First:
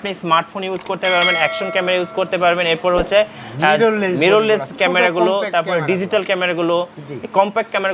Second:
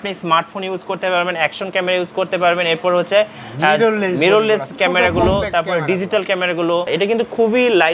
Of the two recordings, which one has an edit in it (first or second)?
second